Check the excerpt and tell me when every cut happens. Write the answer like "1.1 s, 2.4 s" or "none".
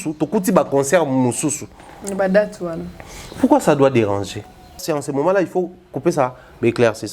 4.8 s